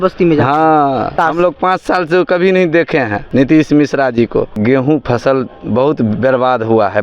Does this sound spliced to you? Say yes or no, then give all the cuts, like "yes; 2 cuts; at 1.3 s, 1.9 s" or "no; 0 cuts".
yes; 3 cuts; at 1.1 s, 3.2 s, 4.6 s